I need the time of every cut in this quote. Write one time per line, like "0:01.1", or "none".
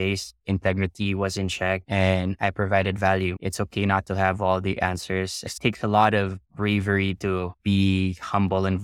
0:03.3
0:05.4